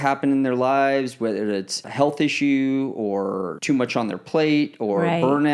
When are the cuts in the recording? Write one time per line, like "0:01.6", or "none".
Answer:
0:01.8
0:03.5